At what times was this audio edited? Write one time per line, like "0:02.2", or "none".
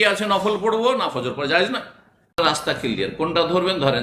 0:02.4